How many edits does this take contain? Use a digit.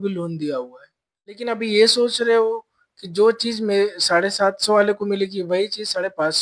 1